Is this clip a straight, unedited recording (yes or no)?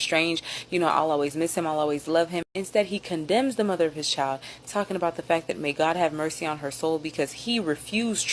no